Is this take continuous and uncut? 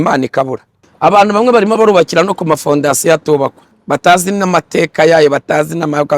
no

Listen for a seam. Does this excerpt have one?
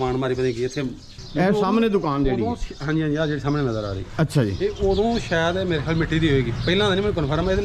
no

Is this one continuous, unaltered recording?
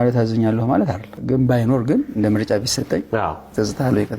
no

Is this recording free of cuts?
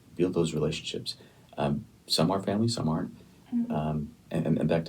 yes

